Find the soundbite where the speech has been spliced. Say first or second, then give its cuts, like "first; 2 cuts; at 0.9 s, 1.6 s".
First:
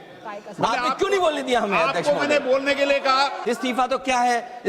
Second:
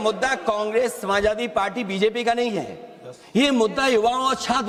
first; 1 cut; at 3.4 s